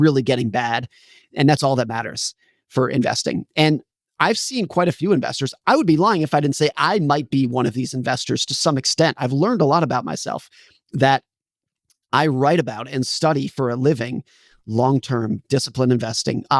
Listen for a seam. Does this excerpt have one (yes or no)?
no